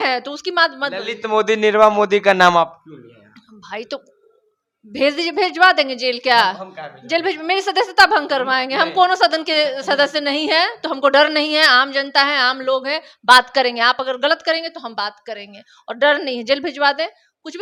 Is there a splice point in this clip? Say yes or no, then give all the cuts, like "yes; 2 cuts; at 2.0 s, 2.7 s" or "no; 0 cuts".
no; 0 cuts